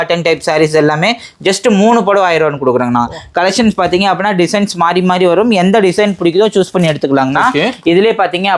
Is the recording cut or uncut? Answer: uncut